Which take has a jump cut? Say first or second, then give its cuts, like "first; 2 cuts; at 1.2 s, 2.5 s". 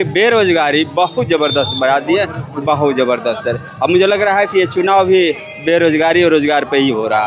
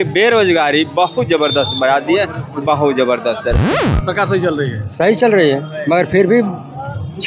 second; 1 cut; at 3.8 s